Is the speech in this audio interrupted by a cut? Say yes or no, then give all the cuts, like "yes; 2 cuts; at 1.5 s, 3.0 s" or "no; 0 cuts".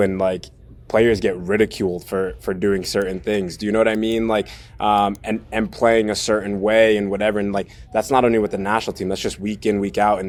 no; 0 cuts